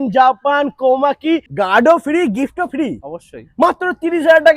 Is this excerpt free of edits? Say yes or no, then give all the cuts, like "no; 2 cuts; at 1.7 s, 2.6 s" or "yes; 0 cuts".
no; 1 cut; at 1.5 s